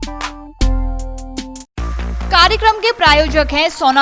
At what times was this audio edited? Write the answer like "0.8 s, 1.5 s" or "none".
none